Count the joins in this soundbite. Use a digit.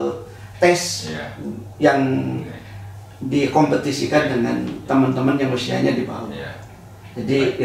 0